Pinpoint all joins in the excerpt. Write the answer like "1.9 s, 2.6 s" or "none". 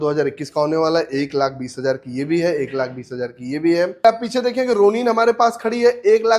4.0 s

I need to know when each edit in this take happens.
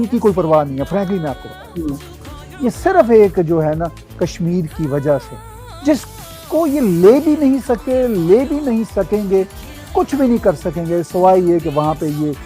2.4 s, 9.6 s

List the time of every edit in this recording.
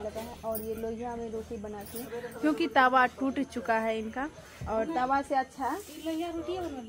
none

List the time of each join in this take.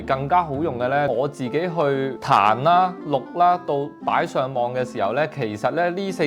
1.1 s

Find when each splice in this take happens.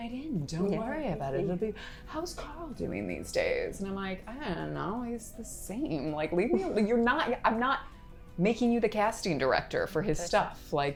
none

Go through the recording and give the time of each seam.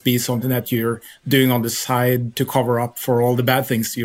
none

